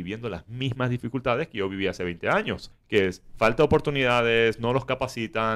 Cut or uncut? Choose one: cut